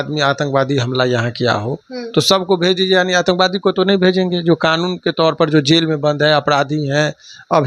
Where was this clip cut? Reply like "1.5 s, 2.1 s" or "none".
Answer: none